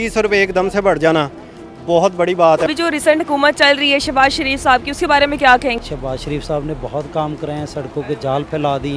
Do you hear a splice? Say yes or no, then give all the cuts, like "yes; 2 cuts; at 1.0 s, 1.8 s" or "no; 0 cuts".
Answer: yes; 2 cuts; at 2.7 s, 5.8 s